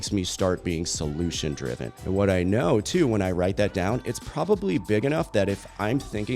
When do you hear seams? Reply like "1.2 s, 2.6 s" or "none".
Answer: 1.9 s